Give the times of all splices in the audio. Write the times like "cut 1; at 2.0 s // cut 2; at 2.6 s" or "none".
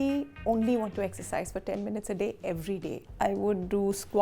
cut 1; at 3.0 s